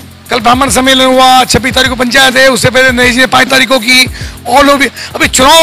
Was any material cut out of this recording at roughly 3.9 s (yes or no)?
no